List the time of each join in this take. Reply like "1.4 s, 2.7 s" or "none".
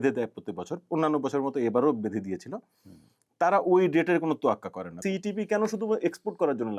5.0 s